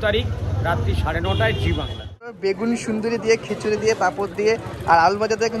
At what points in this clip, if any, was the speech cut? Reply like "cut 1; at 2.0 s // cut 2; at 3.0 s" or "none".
cut 1; at 2.4 s